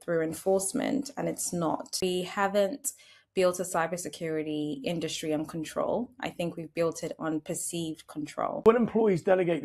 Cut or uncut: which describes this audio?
cut